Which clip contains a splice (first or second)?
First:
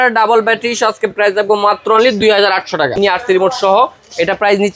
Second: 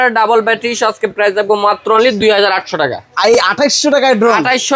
first